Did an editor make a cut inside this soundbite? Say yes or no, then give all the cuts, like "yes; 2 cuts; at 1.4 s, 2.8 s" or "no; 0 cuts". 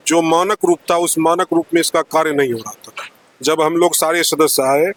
no; 0 cuts